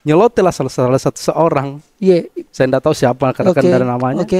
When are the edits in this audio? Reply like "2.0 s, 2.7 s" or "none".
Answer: none